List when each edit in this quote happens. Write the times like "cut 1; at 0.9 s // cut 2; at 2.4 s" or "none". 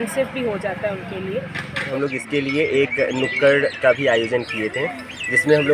cut 1; at 1.9 s